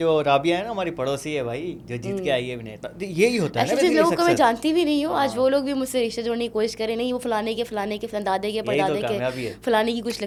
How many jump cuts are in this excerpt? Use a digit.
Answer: 0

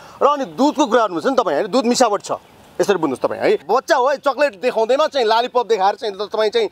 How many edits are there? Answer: 1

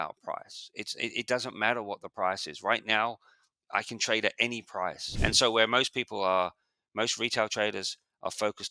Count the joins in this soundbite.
1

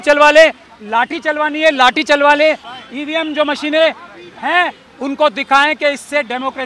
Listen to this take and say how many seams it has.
1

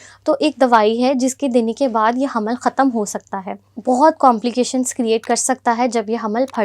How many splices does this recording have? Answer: 1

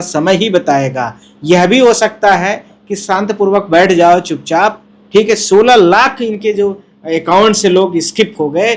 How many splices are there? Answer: 1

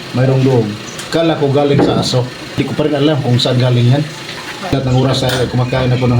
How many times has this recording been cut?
2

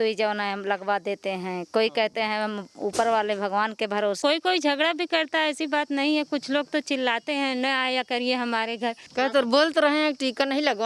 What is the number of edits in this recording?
2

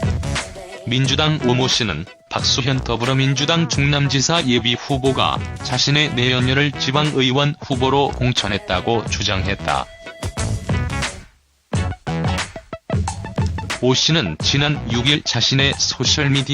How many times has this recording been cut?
1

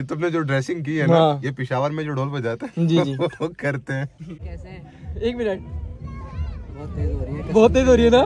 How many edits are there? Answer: 1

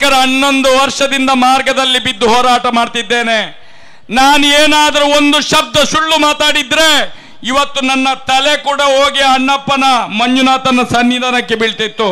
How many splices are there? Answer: 0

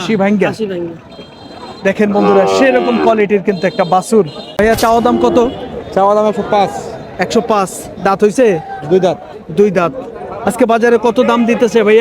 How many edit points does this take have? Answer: 1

